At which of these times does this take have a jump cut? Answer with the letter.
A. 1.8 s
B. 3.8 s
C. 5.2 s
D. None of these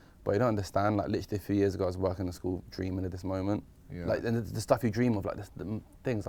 D